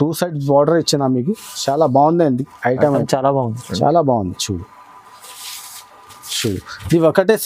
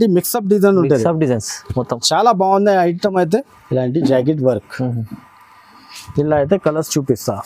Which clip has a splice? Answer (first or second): second